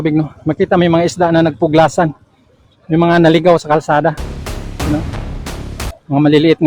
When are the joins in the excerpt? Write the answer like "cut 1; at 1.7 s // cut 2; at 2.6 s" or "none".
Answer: none